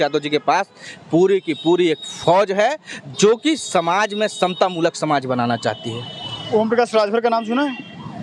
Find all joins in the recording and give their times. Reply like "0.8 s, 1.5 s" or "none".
none